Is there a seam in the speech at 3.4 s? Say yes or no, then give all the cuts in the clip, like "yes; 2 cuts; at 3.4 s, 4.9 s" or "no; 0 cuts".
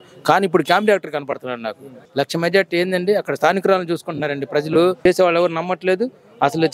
no; 2 cuts; at 2.0 s, 5.0 s